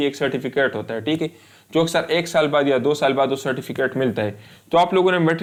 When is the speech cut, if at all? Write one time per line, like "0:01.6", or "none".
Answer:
none